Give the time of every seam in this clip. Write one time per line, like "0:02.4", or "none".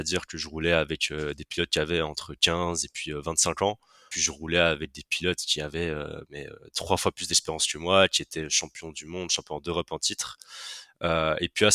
0:04.2